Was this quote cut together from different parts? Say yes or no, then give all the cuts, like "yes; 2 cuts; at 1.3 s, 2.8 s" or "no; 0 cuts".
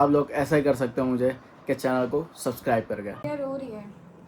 yes; 1 cut; at 3.3 s